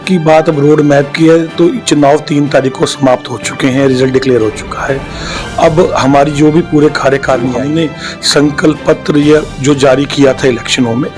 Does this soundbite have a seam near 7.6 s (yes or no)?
yes